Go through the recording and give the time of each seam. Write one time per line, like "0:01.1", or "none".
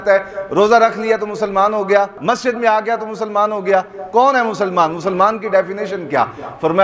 none